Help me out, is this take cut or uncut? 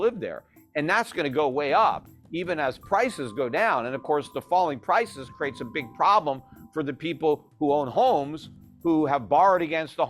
uncut